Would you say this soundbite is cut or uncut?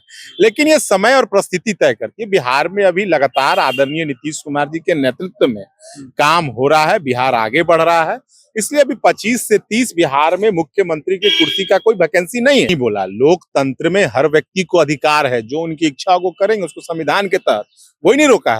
cut